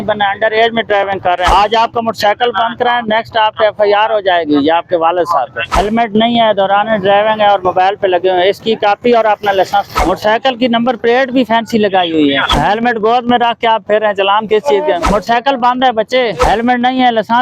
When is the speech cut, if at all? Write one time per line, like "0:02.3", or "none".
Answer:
0:01.5
0:05.6
0:09.9
0:12.5
0:15.1
0:16.5